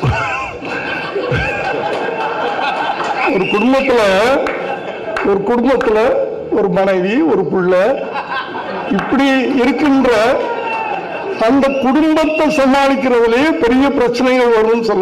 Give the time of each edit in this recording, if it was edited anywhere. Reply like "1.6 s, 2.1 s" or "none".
3.3 s